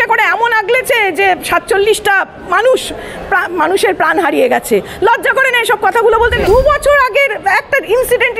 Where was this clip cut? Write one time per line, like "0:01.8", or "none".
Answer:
0:06.4